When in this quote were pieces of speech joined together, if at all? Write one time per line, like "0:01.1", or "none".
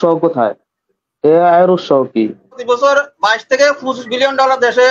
0:02.6